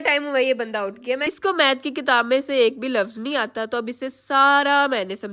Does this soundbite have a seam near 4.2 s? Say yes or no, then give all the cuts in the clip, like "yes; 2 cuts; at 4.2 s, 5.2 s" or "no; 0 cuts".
no; 1 cut; at 1.3 s